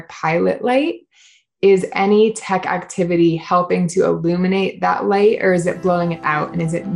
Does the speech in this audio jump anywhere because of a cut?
yes; 1 cut; at 1.4 s

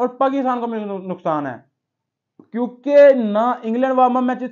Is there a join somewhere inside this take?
no; 0 cuts

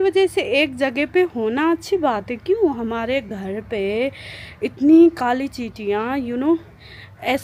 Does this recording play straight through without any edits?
yes; 0 cuts

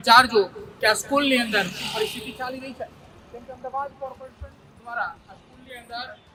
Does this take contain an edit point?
no; 0 cuts

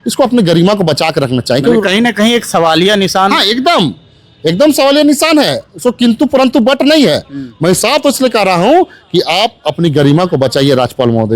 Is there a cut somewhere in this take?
no; 0 cuts

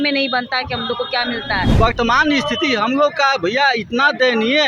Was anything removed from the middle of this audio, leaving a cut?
yes; 1 cut; at 1.7 s

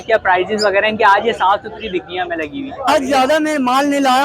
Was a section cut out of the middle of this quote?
yes; 1 cut; at 2.9 s

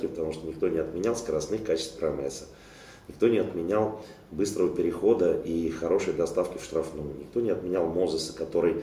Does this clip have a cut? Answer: no; 0 cuts

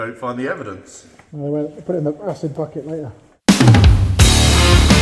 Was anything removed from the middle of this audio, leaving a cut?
no; 0 cuts

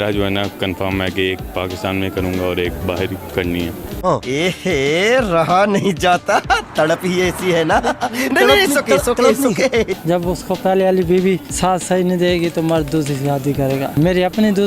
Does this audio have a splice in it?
yes; 4 cuts; at 3.2 s, 10.0 s, 11.5 s, 13.9 s

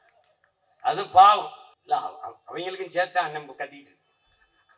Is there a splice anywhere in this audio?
yes; 1 cut; at 1.7 s

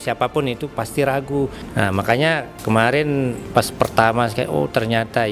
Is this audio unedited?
no; 3 cuts; at 1.6 s, 2.5 s, 3.4 s

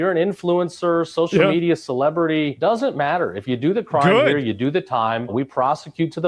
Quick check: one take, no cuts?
no; 1 cut; at 5.3 s

